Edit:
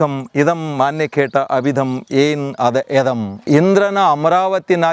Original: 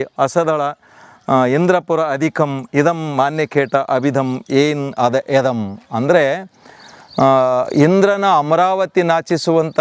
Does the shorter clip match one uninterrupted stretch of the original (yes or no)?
no